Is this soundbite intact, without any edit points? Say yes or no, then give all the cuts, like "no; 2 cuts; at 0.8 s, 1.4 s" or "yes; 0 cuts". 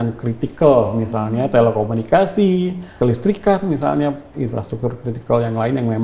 no; 2 cuts; at 2.9 s, 4.3 s